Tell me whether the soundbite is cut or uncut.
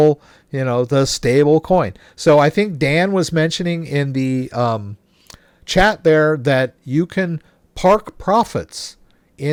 uncut